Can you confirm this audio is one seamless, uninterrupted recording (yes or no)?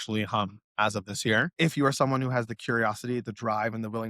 no